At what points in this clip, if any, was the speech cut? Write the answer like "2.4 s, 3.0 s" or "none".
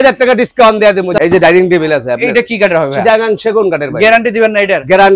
1.1 s

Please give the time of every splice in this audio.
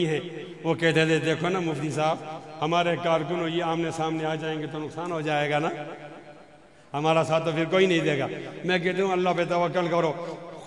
none

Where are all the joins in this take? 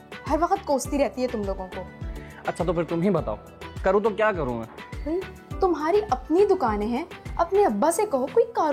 none

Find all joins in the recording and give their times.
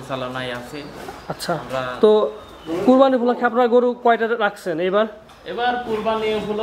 none

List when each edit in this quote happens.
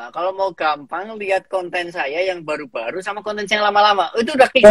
none

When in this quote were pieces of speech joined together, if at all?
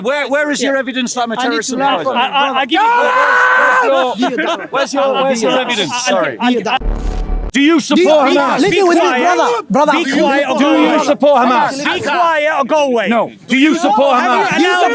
7.3 s

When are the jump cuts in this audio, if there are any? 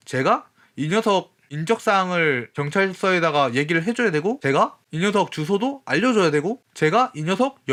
none

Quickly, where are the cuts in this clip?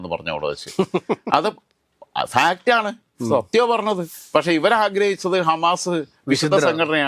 4.1 s

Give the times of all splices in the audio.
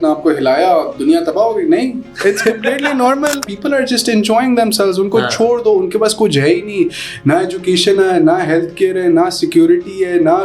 3.5 s

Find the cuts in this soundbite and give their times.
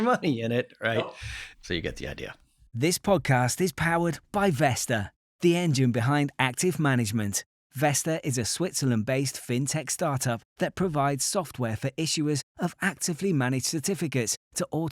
0.9 s, 2.5 s

